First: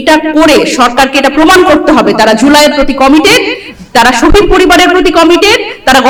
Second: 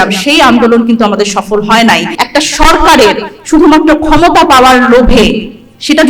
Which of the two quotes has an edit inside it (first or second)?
second